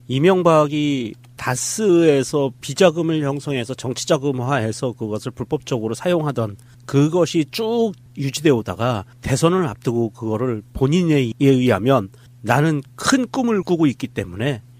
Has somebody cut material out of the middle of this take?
no; 0 cuts

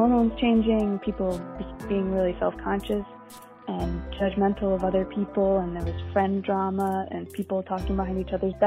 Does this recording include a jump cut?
no; 0 cuts

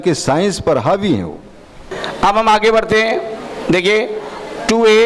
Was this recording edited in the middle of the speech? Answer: yes; 1 cut; at 2.0 s

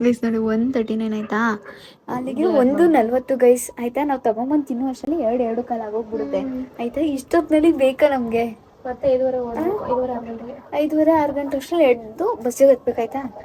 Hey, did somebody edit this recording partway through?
no; 0 cuts

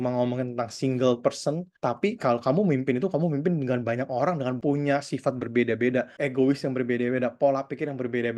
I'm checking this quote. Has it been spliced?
yes; 3 cuts; at 1.7 s, 4.6 s, 6.1 s

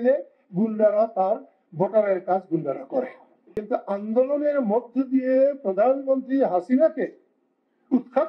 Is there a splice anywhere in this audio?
yes; 1 cut; at 3.6 s

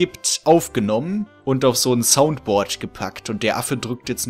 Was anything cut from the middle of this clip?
yes; 1 cut; at 1.3 s

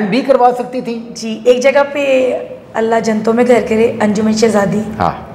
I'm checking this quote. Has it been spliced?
no; 0 cuts

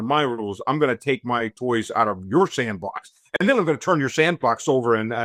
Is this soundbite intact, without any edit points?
yes; 0 cuts

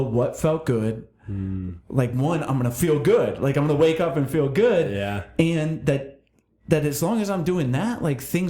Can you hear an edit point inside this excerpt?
no; 0 cuts

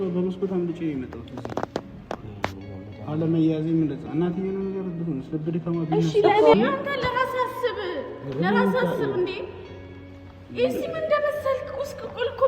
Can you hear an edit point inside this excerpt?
yes; 1 cut; at 6.5 s

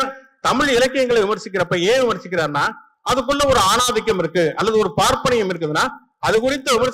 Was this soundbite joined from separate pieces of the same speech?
no; 0 cuts

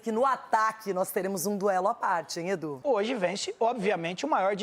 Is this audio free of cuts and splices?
no; 1 cut; at 2.8 s

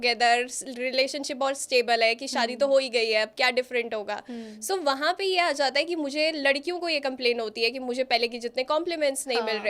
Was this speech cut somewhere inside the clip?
no; 0 cuts

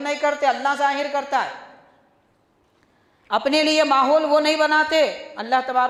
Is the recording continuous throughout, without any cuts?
yes; 0 cuts

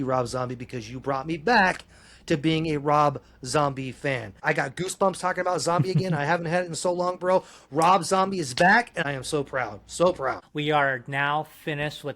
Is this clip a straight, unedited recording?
no; 3 cuts; at 4.4 s, 9.0 s, 10.5 s

